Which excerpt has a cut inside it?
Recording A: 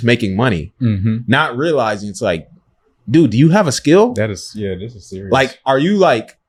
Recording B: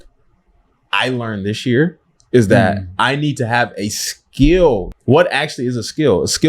B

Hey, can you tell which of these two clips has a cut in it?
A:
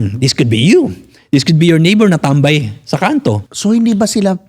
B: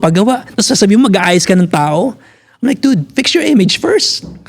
A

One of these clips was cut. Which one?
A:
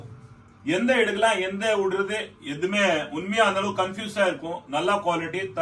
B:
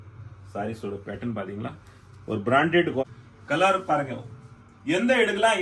B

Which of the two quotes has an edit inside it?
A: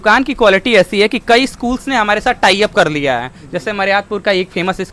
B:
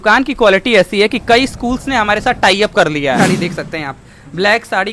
B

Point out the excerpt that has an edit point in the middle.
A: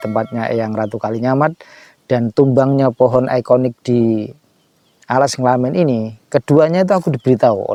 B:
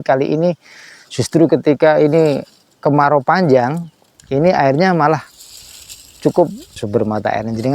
B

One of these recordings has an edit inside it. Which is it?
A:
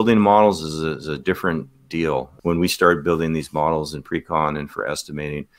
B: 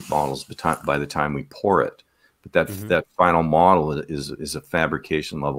A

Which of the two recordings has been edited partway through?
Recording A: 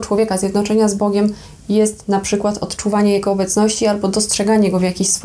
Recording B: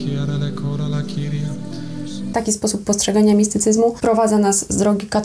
B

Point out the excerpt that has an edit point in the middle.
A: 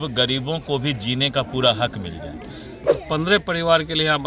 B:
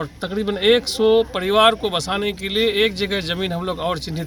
A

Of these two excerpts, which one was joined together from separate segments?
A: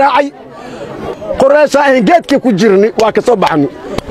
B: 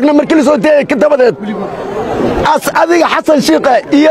A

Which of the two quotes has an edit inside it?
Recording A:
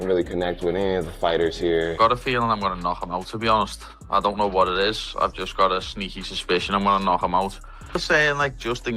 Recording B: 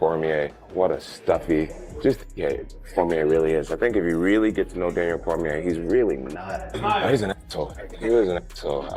A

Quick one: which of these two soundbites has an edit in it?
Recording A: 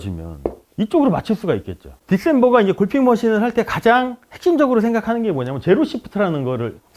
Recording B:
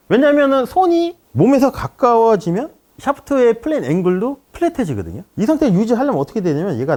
A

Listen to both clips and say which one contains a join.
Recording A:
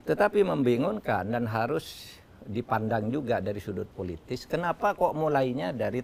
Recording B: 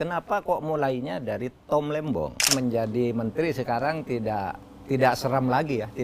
B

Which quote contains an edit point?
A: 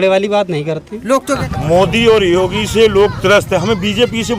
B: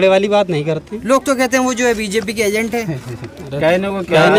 A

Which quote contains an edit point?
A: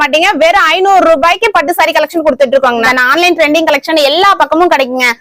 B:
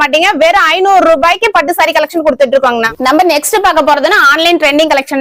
A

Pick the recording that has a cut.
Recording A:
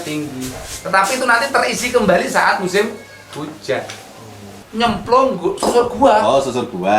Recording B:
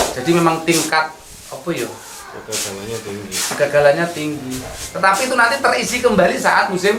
A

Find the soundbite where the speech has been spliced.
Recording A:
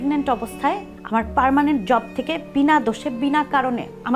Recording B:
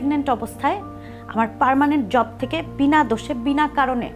A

